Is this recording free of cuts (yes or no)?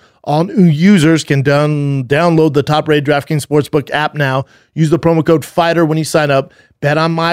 yes